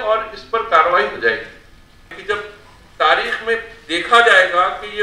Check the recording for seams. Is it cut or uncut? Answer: cut